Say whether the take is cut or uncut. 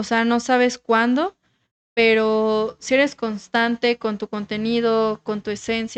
uncut